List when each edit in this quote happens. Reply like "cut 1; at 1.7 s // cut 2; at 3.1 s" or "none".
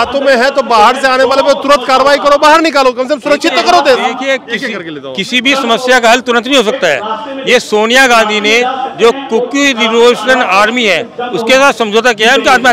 none

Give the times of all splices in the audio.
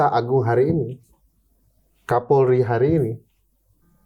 none

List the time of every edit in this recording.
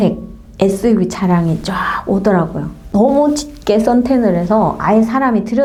none

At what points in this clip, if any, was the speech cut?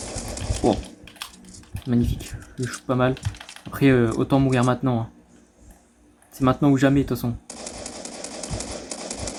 none

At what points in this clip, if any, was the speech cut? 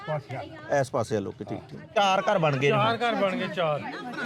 cut 1; at 1.8 s

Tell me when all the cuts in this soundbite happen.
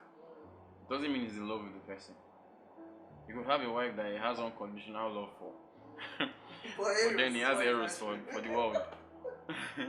none

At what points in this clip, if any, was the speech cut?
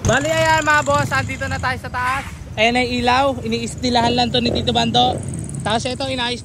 none

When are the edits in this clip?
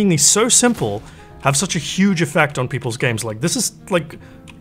none

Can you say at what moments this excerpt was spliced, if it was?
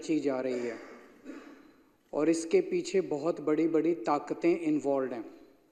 none

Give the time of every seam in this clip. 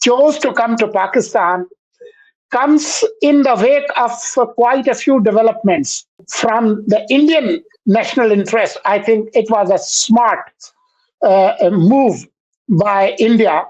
cut 1; at 6.2 s

